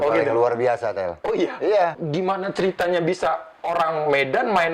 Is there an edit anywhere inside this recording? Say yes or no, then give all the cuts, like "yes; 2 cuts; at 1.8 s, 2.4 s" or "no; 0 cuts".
yes; 1 cut; at 2.0 s